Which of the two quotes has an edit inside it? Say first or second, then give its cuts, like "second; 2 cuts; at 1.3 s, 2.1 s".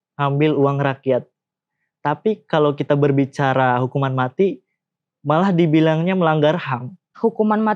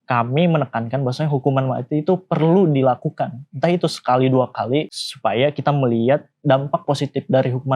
second; 1 cut; at 5.0 s